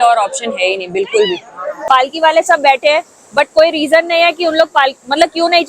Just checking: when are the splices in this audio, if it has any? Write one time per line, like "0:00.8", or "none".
0:01.7